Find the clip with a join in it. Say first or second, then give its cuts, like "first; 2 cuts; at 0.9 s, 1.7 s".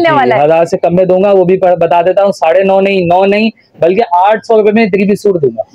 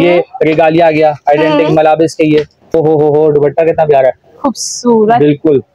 second; 1 cut; at 2.7 s